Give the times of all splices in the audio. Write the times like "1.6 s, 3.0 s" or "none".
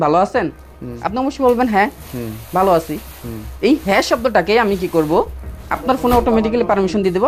none